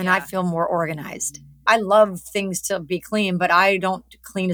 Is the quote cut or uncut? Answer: cut